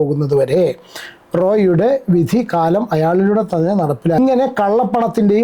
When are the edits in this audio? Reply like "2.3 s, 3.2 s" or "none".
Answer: 4.2 s